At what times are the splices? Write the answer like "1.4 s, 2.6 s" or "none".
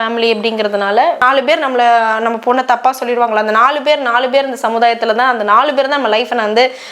1.2 s